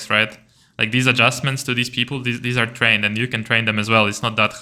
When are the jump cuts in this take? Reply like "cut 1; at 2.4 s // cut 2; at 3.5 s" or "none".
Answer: none